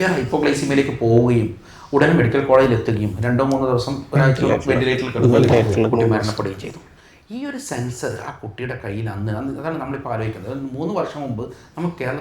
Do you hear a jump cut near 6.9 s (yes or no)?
no